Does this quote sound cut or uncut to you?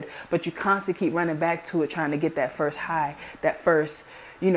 uncut